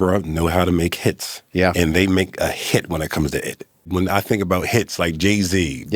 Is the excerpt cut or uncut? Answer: cut